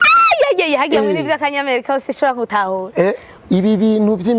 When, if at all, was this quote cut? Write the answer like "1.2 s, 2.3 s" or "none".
3.3 s

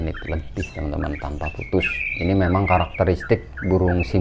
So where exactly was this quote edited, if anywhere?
2.0 s

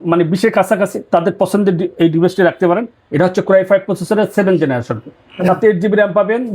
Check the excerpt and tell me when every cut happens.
none

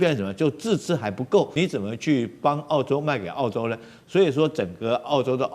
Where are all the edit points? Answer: 1.5 s

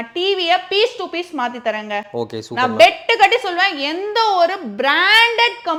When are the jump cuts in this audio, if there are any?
none

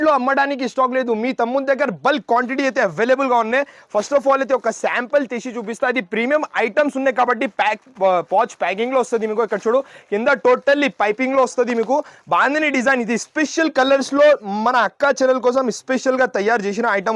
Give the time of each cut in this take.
none

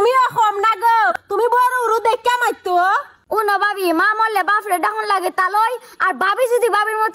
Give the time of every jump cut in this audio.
1.2 s, 3.1 s

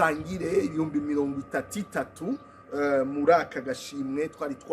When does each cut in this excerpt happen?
none

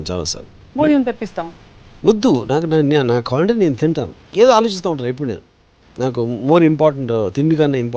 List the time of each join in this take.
4.1 s

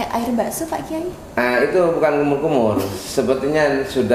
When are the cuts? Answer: none

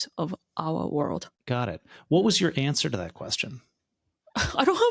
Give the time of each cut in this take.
1.3 s

